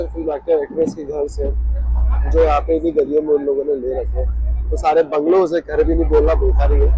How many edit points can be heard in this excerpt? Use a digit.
0